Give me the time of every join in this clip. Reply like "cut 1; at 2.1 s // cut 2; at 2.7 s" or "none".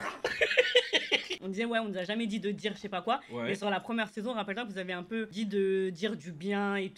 cut 1; at 1.4 s